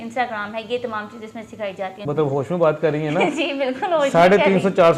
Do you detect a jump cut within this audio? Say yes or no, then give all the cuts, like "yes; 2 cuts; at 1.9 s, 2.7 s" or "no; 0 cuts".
yes; 1 cut; at 2.0 s